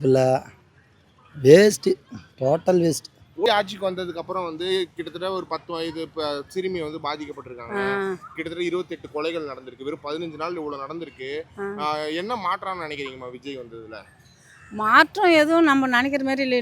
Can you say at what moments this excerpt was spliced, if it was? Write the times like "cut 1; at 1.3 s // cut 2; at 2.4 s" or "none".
cut 1; at 3.5 s